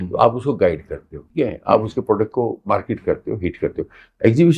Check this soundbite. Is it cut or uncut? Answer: cut